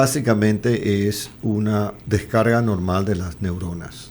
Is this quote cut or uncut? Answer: cut